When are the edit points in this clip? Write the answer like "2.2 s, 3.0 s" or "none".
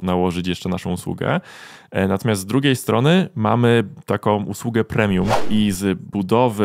5.4 s